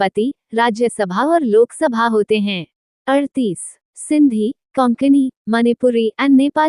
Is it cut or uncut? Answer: uncut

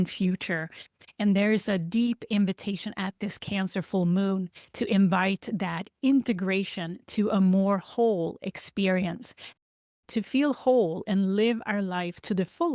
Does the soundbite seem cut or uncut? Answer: cut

